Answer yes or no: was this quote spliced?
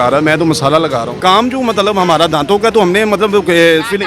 yes